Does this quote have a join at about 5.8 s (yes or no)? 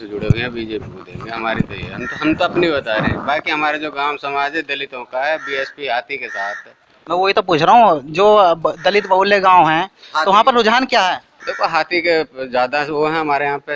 no